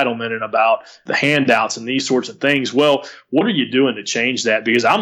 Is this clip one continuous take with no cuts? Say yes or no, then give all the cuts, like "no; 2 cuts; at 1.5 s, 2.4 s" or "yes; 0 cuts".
no; 1 cut; at 1.0 s